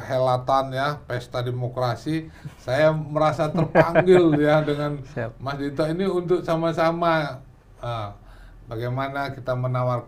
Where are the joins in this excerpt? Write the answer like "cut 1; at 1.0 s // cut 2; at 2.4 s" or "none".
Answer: none